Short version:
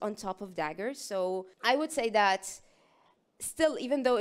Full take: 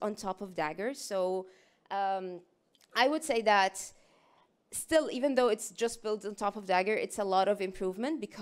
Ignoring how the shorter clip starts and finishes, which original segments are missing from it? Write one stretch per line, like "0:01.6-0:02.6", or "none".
0:01.5-0:02.8